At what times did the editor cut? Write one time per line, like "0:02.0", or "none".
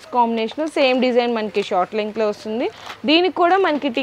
none